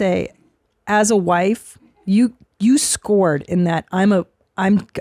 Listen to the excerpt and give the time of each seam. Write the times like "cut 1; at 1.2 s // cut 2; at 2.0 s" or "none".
none

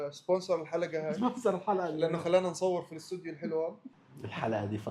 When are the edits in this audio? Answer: cut 1; at 3.9 s

